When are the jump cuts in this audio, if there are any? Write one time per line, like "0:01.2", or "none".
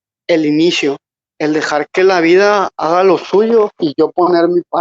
0:01.1
0:03.8